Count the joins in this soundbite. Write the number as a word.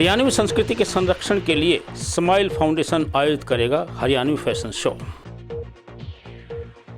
one